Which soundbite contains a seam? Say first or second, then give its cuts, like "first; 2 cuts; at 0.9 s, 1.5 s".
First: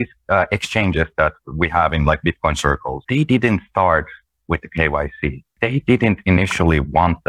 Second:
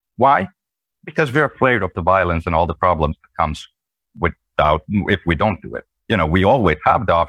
first; 2 cuts; at 2.9 s, 5.5 s